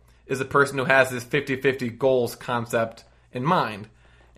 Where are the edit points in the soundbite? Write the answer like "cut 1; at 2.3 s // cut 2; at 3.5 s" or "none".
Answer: none